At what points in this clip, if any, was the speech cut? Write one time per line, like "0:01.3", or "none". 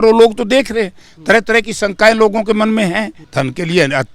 0:03.2